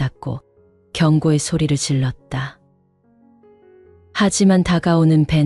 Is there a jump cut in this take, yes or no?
no